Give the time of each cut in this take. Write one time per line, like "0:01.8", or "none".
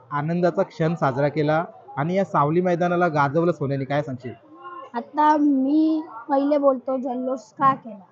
none